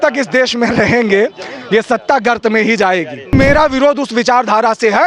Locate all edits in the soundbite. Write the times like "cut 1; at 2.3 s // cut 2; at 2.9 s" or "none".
cut 1; at 3.3 s